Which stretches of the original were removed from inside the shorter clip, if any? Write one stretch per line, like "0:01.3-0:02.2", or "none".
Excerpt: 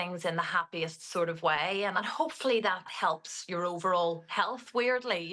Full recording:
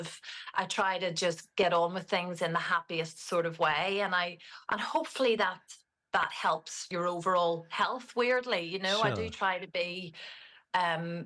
0:04.1-0:04.7
0:05.7-0:06.3